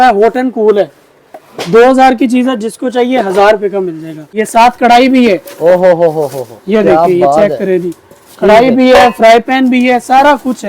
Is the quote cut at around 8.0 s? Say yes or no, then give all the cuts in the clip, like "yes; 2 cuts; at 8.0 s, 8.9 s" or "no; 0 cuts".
no; 1 cut; at 4.4 s